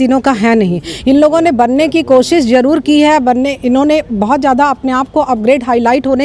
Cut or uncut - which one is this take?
uncut